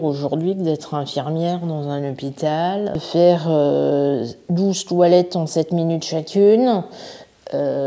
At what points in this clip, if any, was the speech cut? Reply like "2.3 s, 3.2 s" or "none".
3.0 s